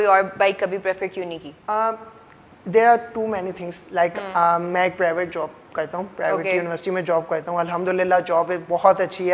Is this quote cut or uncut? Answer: uncut